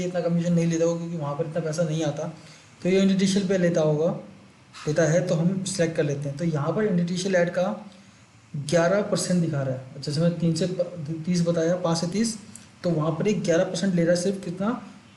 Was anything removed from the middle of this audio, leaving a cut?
no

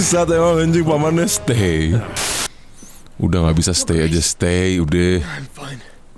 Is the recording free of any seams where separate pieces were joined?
no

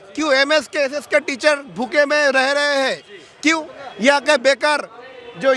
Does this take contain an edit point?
no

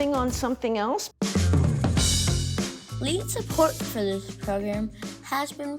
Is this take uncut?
no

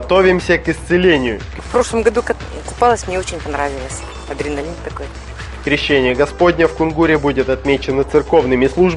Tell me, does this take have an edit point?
no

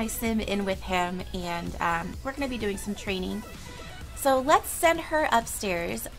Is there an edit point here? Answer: yes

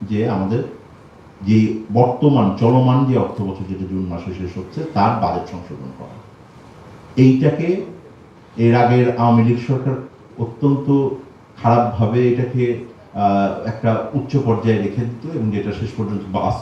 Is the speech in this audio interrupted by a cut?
no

